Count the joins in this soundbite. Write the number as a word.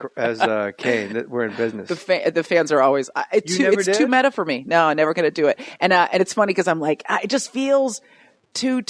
one